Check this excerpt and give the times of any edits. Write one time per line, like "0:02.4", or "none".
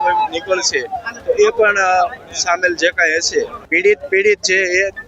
0:03.6